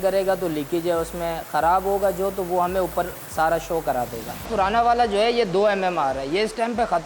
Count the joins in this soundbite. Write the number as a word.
one